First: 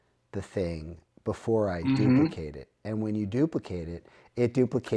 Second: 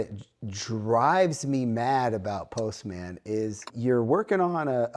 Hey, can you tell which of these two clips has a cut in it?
second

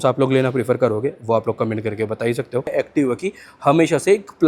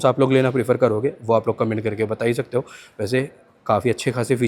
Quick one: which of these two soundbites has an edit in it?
first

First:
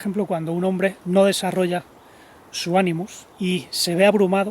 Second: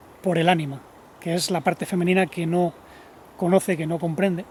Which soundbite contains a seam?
first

